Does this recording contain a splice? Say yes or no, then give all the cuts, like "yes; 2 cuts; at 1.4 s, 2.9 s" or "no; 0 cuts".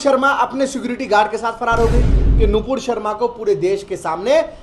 yes; 1 cut; at 2.2 s